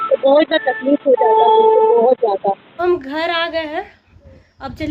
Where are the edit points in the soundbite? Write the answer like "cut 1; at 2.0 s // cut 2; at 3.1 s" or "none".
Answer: cut 1; at 2.7 s

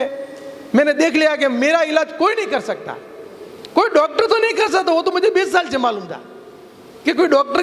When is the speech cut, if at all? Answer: none

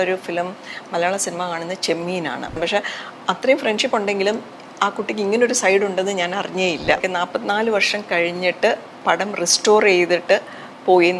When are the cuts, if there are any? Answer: cut 1; at 2.6 s // cut 2; at 7.0 s

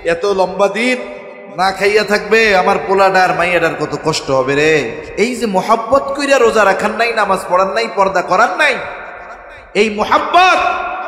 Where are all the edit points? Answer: none

